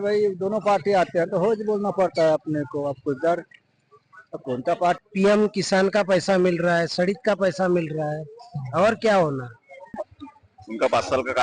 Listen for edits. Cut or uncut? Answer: cut